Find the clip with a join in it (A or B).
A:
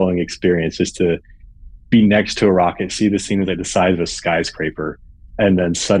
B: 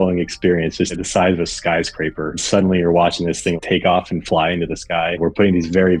B